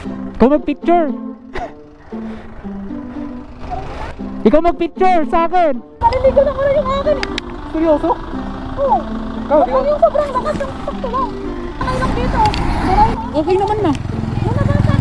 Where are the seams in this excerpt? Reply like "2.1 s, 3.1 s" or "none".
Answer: none